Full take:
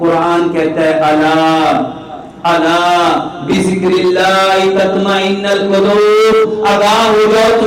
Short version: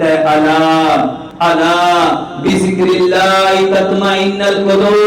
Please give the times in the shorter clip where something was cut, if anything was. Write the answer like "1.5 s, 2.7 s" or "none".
1.2 s